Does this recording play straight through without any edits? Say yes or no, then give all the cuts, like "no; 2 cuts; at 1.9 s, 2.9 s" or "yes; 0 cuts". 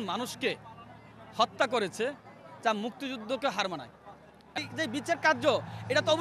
no; 1 cut; at 4.6 s